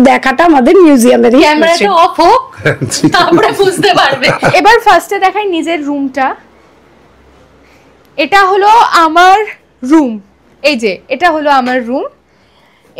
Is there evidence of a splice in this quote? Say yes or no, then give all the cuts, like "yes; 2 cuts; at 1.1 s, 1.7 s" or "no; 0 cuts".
yes; 1 cut; at 4.5 s